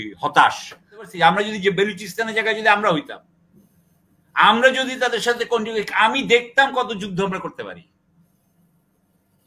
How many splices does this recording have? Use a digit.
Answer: 1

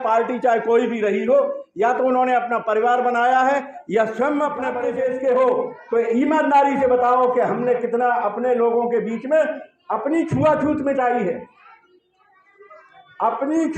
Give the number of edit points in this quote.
1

